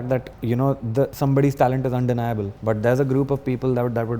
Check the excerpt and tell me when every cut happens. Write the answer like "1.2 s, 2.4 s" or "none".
none